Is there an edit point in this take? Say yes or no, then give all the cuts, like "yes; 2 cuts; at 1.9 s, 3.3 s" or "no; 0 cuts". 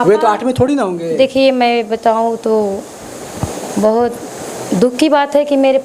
no; 0 cuts